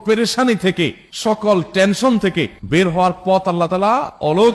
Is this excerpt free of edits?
yes; 0 cuts

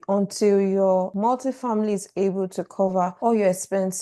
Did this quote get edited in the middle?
no; 0 cuts

